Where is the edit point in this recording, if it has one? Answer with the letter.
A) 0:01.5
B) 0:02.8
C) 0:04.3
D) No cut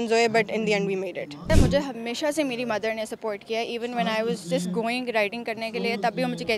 A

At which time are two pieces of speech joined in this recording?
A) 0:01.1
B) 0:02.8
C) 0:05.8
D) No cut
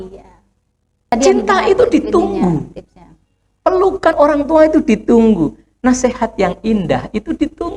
A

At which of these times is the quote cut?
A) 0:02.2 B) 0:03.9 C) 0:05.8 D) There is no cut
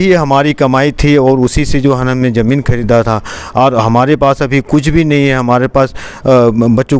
D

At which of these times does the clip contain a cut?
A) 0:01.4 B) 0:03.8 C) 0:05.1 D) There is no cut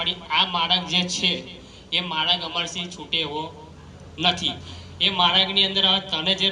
D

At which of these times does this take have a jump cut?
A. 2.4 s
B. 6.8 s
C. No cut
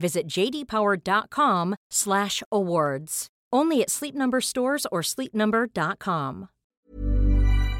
B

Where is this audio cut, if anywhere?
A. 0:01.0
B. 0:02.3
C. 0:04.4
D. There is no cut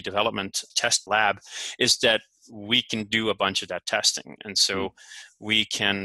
A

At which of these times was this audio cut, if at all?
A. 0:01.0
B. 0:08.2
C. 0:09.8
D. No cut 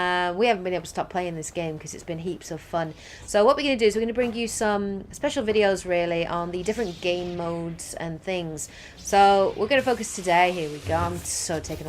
A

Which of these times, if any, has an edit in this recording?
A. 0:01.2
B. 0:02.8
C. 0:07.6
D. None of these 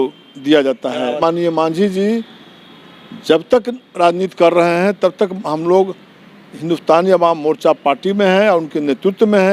A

